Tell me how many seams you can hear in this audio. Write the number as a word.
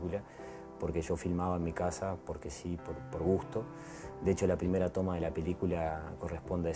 one